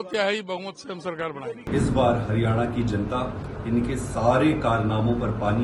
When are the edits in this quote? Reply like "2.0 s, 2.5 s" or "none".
1.6 s